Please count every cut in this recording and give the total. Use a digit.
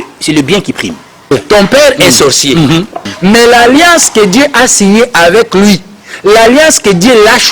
2